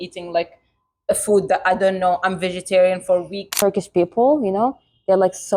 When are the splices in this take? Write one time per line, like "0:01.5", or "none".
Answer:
0:03.6